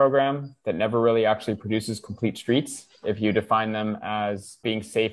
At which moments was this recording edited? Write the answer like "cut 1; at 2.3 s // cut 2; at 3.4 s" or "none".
none